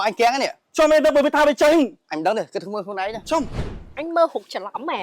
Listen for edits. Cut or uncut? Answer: cut